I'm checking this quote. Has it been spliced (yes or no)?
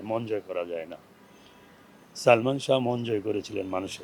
no